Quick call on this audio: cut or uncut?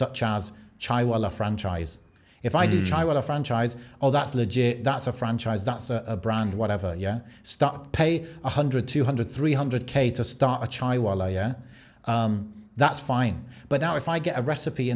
uncut